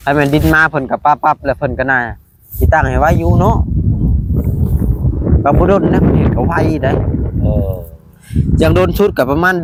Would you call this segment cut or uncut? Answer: uncut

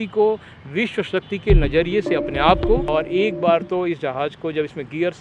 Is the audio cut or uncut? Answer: cut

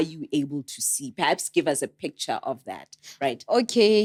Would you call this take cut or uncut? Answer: uncut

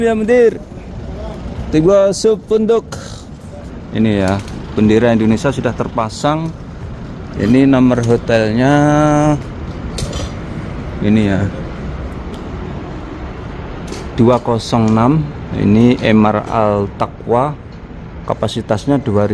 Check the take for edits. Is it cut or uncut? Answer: uncut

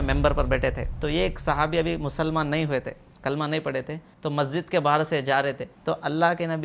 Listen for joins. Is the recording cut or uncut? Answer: cut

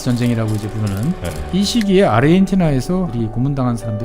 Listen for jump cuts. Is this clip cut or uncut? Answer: cut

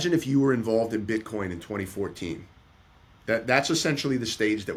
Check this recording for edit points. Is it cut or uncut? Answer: uncut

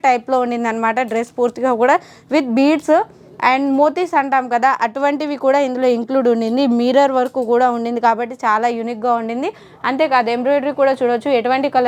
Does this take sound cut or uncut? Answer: uncut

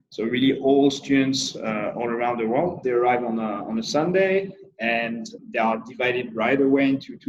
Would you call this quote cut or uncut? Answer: cut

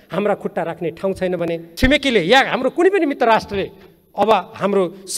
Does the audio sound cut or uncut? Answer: cut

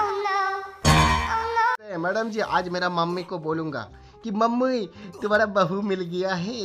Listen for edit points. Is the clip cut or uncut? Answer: cut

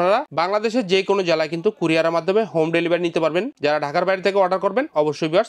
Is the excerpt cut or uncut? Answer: uncut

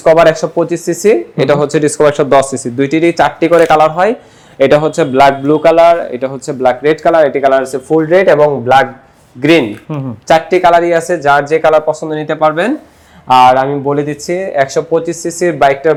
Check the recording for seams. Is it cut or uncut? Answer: uncut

